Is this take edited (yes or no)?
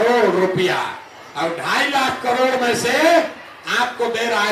no